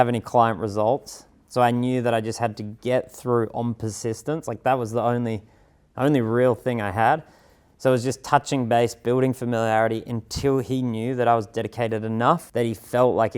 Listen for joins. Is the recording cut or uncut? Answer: cut